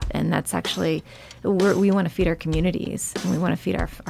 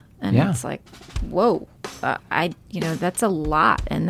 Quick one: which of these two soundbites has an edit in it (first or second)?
second